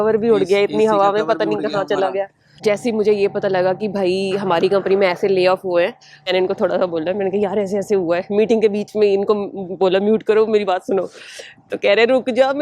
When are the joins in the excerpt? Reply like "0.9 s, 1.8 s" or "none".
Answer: 2.4 s, 6.3 s